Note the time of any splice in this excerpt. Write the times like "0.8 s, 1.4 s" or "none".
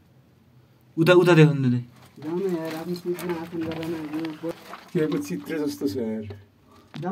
4.5 s